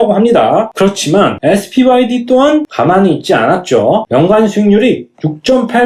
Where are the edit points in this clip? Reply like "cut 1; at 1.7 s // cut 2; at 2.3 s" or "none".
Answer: none